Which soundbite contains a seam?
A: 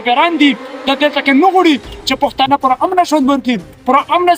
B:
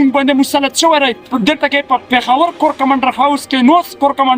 B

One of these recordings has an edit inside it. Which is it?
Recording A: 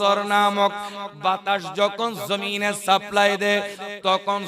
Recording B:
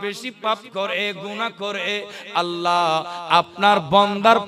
A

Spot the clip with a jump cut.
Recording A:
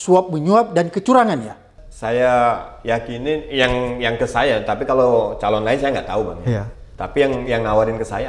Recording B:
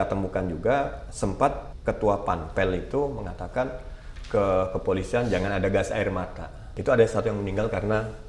B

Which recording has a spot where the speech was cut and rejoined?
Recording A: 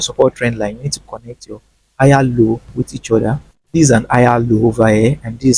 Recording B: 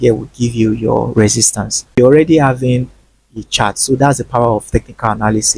B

